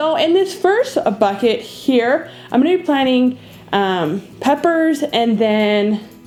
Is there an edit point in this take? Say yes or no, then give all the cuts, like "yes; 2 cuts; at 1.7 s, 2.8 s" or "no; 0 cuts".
no; 0 cuts